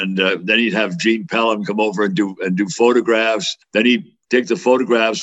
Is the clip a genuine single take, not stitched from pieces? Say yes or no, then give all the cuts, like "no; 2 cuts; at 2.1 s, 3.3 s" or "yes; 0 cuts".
no; 1 cut; at 4.1 s